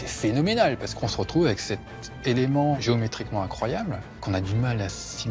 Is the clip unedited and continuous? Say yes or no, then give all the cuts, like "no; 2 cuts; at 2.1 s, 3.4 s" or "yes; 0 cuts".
no; 3 cuts; at 1.0 s, 2.8 s, 4.2 s